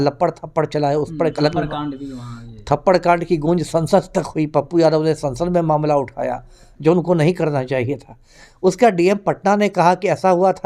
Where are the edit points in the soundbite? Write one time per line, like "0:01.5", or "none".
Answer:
none